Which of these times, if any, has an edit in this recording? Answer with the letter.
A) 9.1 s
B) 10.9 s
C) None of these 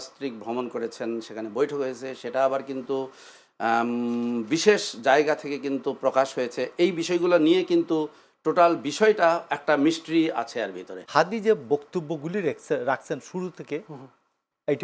B